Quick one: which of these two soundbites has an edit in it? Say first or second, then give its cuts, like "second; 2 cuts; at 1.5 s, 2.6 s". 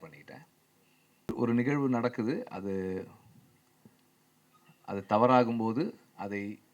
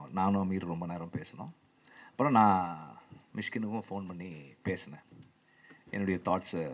first; 1 cut; at 1.3 s